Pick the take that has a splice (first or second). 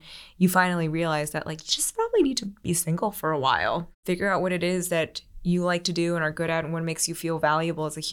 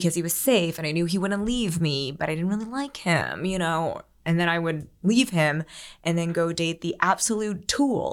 first